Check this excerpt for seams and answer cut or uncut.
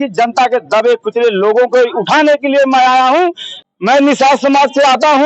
cut